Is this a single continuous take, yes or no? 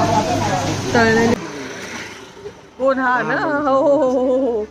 no